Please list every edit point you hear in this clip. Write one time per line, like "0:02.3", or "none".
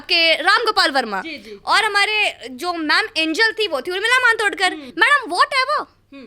0:04.8